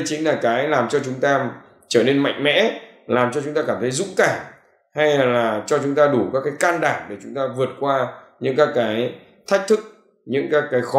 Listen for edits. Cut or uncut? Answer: uncut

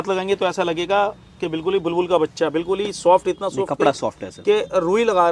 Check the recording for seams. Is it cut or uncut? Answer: uncut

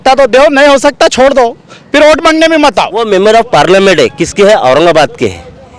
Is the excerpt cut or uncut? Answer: cut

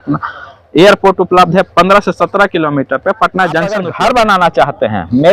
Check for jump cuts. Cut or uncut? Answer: cut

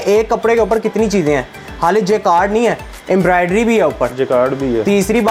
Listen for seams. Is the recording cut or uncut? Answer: uncut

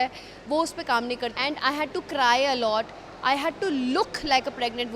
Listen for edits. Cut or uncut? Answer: cut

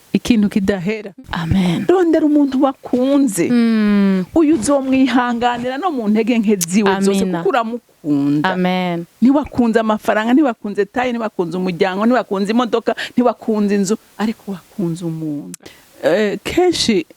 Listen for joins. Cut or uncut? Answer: cut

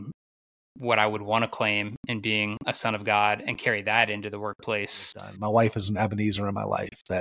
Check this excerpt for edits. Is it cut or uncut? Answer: cut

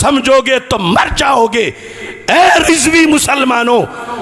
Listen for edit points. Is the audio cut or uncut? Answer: uncut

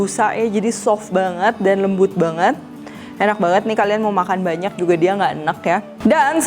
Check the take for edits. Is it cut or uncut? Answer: uncut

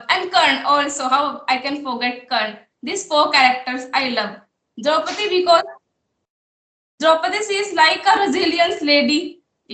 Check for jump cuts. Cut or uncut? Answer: uncut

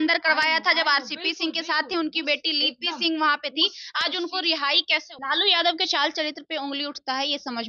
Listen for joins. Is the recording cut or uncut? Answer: cut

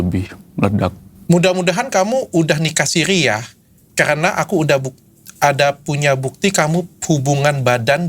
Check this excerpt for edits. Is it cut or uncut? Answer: cut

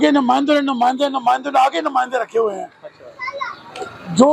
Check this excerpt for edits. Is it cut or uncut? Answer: uncut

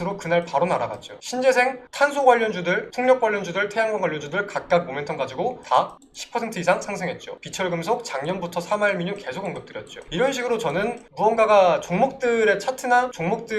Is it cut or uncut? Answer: uncut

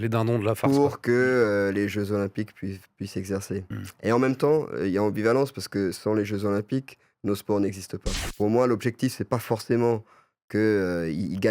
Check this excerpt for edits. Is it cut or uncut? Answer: cut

